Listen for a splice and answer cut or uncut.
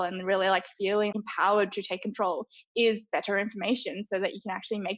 cut